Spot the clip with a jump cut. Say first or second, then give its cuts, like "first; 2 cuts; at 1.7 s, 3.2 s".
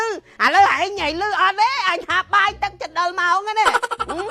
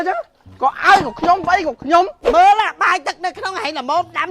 second; 1 cut; at 2.2 s